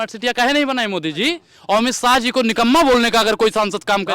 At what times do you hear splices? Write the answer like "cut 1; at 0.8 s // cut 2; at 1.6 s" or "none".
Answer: cut 1; at 1.5 s